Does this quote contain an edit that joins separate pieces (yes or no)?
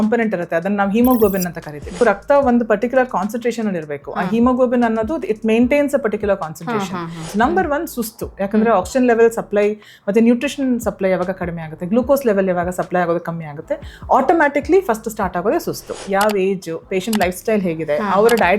yes